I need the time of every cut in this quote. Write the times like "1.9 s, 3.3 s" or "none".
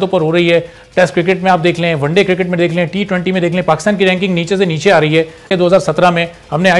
5.5 s